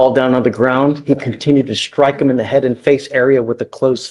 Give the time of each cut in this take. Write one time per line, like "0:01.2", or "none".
none